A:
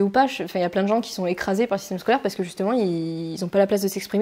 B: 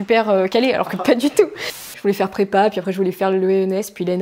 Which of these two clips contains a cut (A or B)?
B